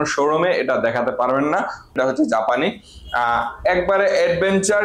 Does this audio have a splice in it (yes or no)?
yes